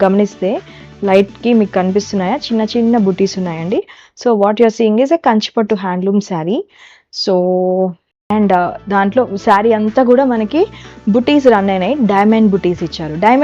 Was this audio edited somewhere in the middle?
yes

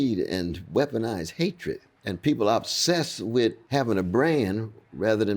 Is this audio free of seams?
no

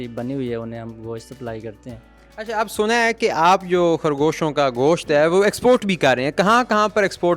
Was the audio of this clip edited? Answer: no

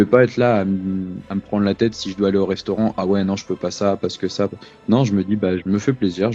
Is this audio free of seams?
yes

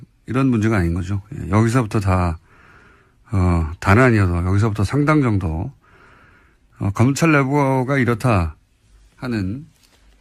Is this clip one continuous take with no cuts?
yes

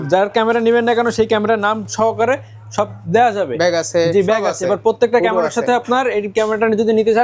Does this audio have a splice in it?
no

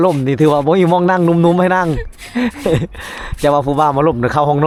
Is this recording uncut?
yes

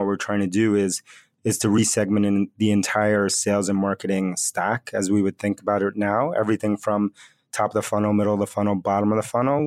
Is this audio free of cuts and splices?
yes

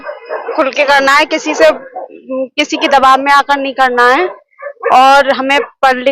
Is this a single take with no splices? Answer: yes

